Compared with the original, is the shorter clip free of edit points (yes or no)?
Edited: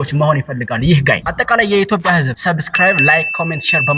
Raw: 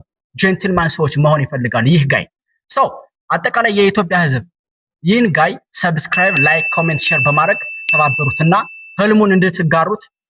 no